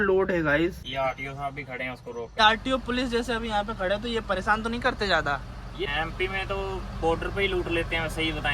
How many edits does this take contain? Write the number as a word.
three